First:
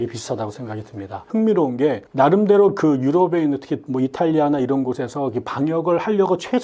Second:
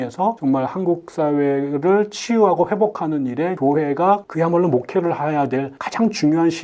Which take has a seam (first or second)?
first